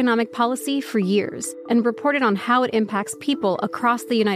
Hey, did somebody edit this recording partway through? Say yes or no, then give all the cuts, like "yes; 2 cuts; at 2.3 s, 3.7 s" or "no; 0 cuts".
yes; 1 cut; at 1.4 s